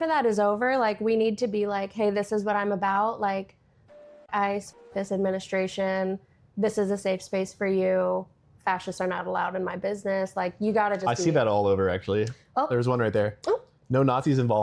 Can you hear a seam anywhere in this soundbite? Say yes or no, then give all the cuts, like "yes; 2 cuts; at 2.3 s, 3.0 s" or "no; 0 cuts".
no; 0 cuts